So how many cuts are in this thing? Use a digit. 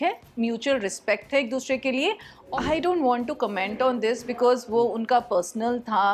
1